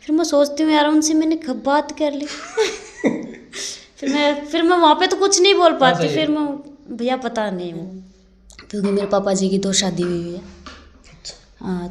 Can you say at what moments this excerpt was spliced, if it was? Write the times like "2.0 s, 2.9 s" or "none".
7.9 s